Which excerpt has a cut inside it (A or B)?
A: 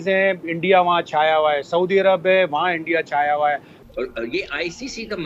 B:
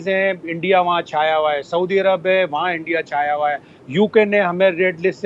A